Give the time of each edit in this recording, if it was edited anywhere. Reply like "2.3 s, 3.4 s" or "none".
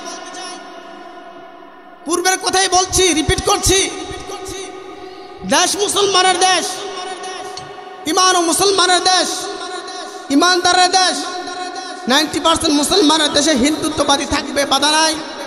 none